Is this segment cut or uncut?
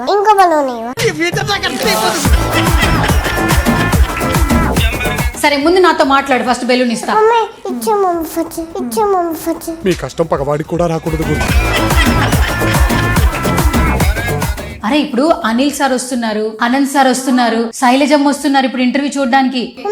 cut